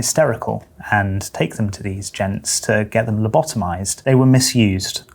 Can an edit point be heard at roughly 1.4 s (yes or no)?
no